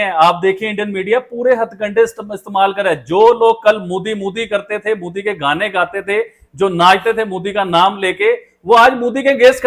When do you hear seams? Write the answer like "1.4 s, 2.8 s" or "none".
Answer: none